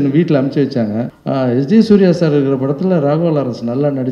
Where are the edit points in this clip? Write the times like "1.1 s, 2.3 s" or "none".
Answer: 1.1 s